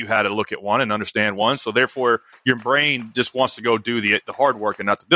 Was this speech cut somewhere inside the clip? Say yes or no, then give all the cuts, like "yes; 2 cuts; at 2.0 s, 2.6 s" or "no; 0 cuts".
no; 0 cuts